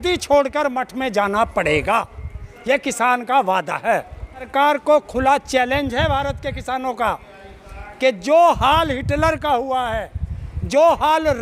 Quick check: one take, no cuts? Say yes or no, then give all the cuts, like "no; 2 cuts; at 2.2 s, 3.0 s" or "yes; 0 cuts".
no; 1 cut; at 4.5 s